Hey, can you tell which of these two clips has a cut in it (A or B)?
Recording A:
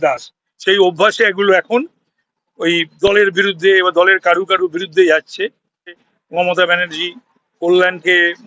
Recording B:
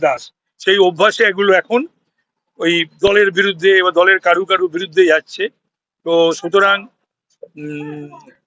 A